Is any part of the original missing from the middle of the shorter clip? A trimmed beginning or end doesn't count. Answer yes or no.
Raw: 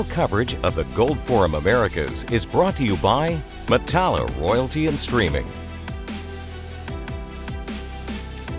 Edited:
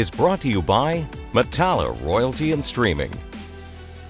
yes